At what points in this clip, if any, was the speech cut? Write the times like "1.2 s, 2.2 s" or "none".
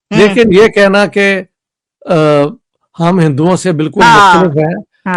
none